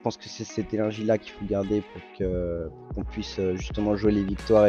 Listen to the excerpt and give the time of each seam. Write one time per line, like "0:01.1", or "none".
none